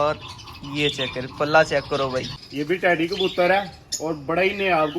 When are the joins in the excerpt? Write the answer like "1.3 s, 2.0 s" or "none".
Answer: 2.4 s